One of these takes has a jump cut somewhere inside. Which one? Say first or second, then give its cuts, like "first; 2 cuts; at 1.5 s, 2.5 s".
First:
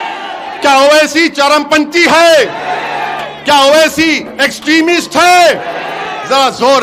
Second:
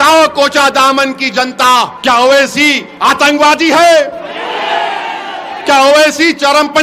second; 2 cuts; at 1.9 s, 2.9 s